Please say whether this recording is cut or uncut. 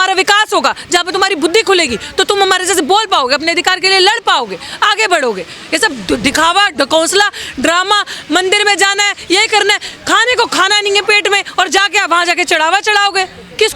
uncut